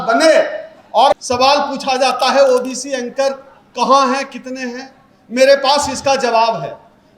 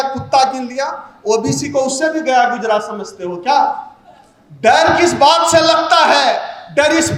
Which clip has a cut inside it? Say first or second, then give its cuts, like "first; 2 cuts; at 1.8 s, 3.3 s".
first; 1 cut; at 1.1 s